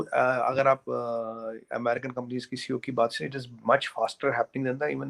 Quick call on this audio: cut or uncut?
uncut